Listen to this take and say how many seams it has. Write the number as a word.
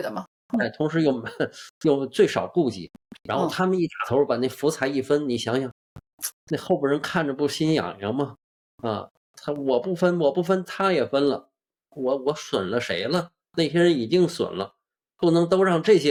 zero